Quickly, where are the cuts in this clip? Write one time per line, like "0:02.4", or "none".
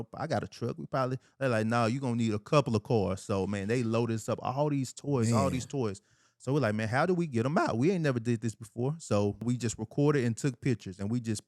0:09.4